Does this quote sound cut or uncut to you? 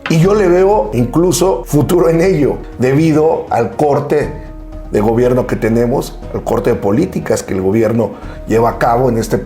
cut